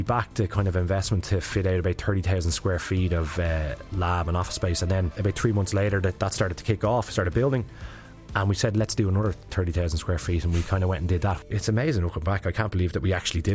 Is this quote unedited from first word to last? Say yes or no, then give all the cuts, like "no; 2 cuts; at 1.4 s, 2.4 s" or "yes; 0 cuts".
no; 2 cuts; at 5.2 s, 11.4 s